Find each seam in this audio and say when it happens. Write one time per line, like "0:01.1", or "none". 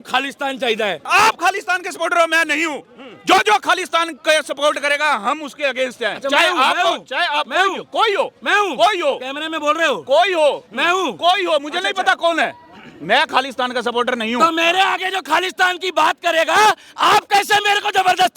0:01.0